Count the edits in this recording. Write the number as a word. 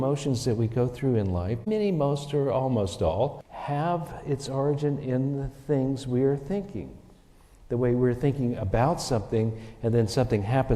two